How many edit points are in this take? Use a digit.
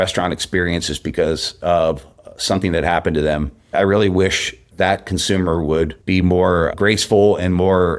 2